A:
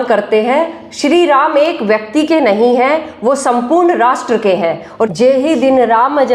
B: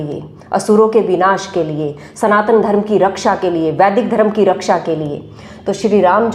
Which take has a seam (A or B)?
A